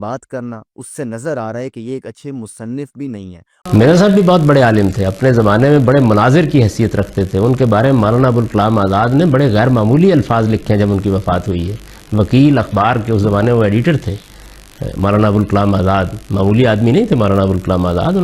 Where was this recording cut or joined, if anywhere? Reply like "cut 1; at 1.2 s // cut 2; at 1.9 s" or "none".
cut 1; at 3.4 s